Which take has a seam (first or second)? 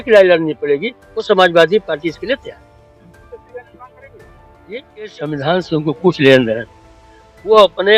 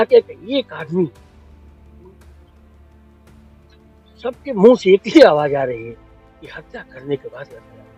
first